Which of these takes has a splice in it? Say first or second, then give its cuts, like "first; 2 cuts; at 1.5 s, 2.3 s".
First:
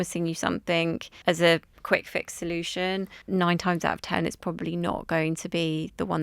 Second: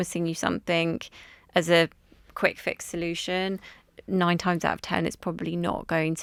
first; 3 cuts; at 1.1 s, 1.7 s, 3.2 s